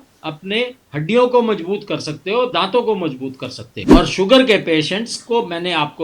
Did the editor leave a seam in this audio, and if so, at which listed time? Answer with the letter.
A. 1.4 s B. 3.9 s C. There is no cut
B